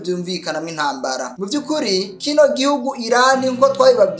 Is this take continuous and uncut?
no; 1 cut; at 1.3 s

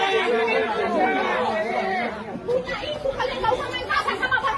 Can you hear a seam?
no; 0 cuts

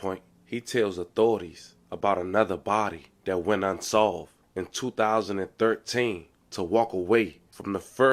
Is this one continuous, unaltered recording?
yes; 0 cuts

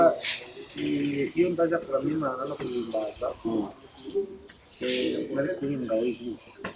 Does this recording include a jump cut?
no; 0 cuts

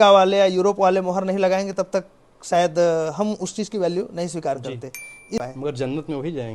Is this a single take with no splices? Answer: no; 1 cut; at 5.4 s

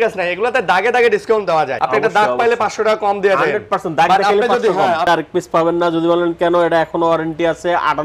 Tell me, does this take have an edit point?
yes; 2 cuts; at 1.8 s, 5.1 s

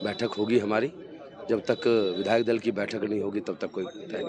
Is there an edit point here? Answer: no; 0 cuts

